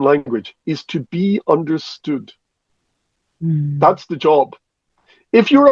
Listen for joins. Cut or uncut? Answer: uncut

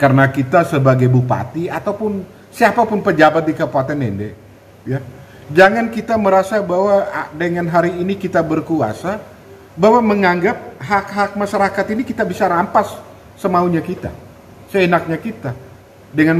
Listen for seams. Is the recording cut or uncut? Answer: uncut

